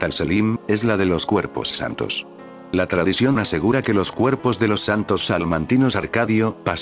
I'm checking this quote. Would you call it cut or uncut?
cut